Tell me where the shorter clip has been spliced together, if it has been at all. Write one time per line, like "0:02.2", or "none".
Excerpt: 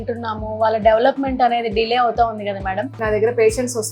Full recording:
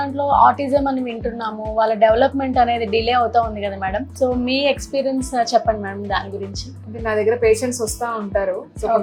0:02.9